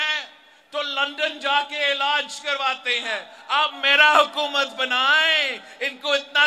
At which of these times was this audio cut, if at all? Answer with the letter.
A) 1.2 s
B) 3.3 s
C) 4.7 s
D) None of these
B